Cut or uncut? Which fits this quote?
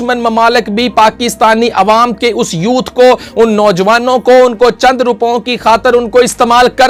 uncut